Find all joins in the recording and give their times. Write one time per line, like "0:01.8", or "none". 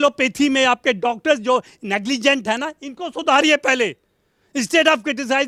none